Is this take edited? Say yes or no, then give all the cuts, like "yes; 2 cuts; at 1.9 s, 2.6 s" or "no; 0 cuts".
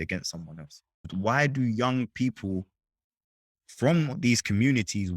yes; 1 cut; at 1.1 s